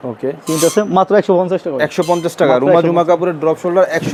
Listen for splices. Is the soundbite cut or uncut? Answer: uncut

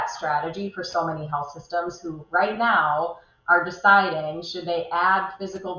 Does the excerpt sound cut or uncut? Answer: uncut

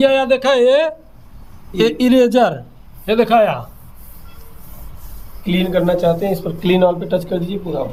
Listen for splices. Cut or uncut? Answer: uncut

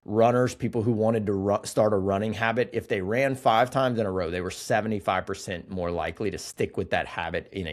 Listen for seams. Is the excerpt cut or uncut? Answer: uncut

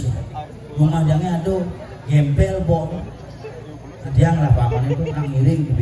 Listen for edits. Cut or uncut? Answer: uncut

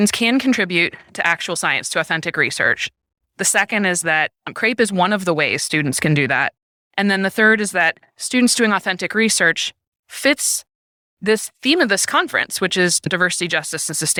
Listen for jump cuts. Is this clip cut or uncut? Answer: uncut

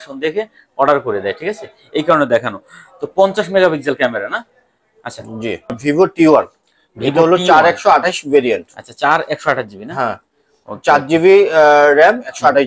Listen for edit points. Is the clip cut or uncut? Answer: cut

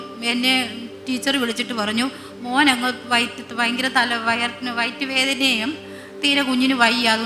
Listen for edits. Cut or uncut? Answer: uncut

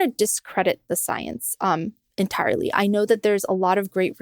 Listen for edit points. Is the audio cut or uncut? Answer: uncut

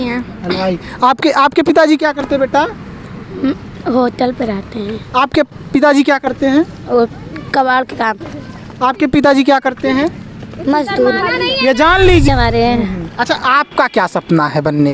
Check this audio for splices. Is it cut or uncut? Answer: cut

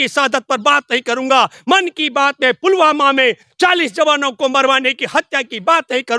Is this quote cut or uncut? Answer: uncut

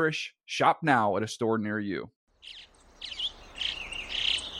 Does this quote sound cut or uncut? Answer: cut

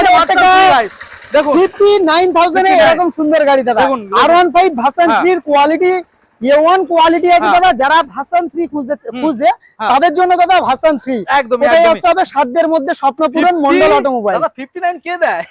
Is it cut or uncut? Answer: uncut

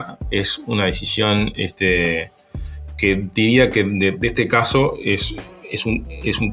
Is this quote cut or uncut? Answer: uncut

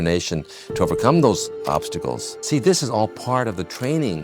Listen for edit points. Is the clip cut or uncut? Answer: cut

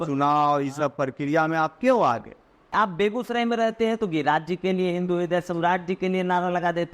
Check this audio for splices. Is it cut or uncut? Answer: cut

